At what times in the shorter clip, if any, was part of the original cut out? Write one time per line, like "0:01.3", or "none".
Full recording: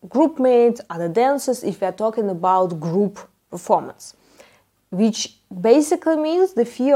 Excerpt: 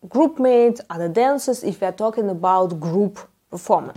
none